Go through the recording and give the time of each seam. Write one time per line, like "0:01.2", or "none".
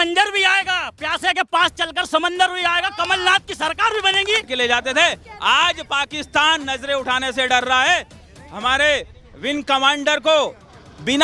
0:04.5

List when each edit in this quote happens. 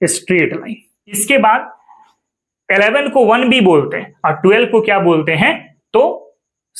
0:01.2

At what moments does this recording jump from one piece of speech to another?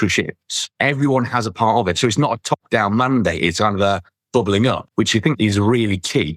0:05.3

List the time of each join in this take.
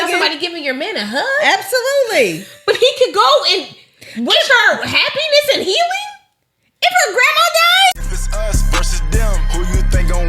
0:07.9

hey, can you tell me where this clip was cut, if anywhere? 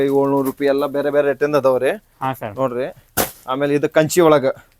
none

